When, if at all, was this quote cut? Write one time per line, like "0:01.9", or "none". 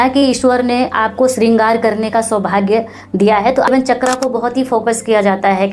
0:03.7